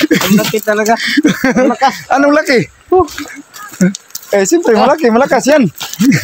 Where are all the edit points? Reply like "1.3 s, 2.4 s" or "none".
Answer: none